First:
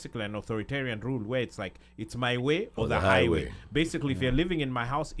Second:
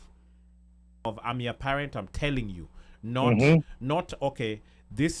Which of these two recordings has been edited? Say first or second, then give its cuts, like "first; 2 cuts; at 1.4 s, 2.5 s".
second; 1 cut; at 1.0 s